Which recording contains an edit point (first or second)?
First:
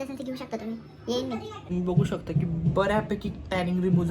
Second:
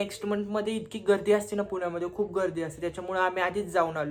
first